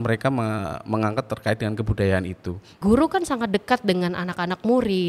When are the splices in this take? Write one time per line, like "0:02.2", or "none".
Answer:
0:02.8